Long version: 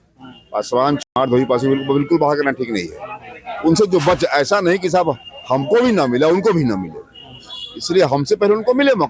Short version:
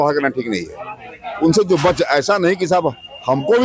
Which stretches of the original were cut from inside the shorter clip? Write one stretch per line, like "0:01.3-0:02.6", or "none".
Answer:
none